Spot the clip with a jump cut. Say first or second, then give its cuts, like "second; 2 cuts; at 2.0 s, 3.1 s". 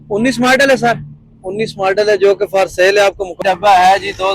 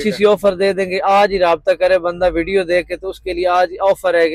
first; 1 cut; at 3.4 s